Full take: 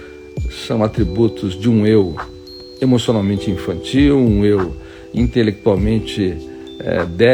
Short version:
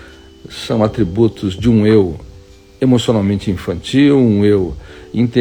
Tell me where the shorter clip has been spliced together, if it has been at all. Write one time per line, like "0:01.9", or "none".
none